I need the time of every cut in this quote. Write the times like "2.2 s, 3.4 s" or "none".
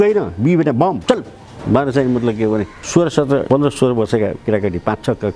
1.0 s, 2.8 s, 3.4 s